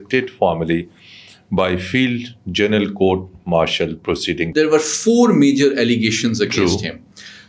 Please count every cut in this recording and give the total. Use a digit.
1